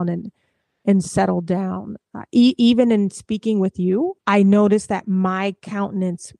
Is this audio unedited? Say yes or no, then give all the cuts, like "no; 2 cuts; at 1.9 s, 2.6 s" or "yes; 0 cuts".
no; 1 cut; at 4.2 s